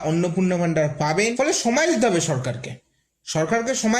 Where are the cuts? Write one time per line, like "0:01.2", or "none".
0:01.3